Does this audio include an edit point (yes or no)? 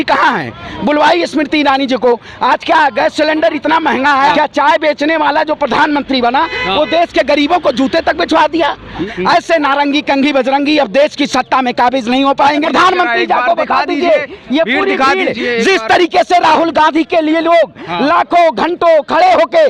yes